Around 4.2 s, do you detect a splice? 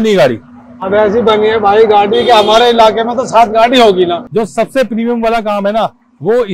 yes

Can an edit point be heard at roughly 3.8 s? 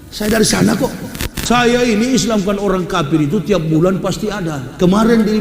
no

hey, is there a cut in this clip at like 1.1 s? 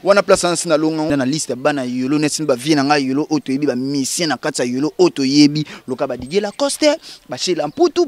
yes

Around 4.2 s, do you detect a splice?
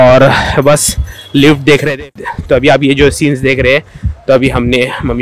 no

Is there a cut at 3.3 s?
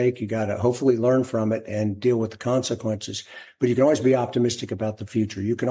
no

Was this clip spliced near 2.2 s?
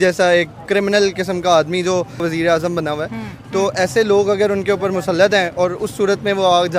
yes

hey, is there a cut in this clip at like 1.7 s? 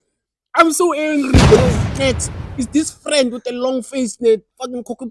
yes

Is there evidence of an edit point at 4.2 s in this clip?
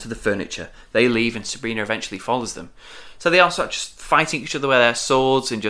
no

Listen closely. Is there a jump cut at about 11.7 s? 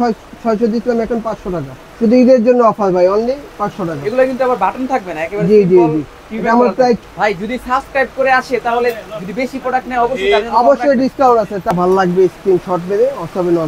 yes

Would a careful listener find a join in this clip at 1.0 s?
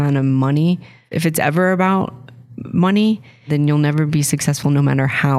yes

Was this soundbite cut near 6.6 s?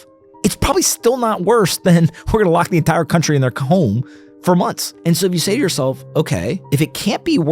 yes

